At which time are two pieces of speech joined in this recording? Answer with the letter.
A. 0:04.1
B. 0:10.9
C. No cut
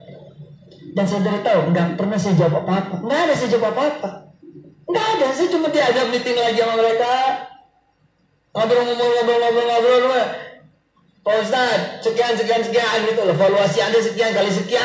C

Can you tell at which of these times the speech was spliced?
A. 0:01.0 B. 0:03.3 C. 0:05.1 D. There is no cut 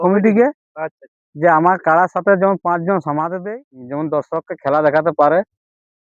B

